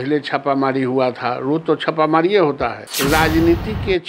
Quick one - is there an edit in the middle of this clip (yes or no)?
yes